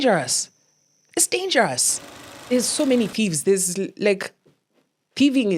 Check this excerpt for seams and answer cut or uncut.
cut